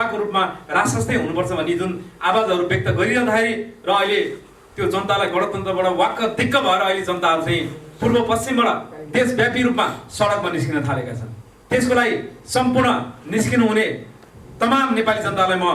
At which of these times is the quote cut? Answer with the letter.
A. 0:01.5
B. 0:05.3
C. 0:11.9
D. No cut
D